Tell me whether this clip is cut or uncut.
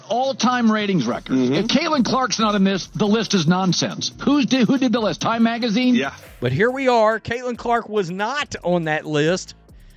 cut